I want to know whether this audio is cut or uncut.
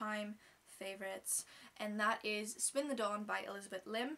uncut